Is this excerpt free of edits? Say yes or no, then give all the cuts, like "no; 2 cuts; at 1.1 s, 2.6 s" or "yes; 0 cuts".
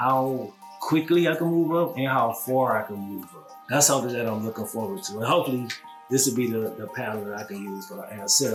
yes; 0 cuts